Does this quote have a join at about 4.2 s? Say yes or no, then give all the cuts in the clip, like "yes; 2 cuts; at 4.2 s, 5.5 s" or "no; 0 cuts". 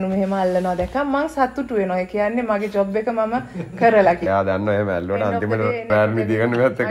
yes; 2 cuts; at 4.2 s, 5.9 s